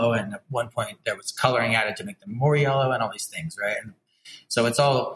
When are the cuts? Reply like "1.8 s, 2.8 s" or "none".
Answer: none